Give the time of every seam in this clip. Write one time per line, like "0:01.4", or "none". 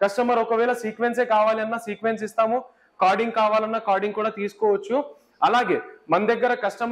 none